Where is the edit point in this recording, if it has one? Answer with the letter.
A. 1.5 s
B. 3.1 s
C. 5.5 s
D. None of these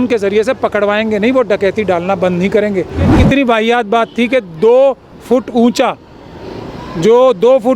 B